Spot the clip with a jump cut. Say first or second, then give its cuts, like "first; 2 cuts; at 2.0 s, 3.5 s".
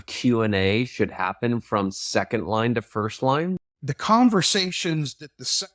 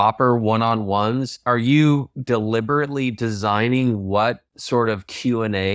first; 1 cut; at 3.6 s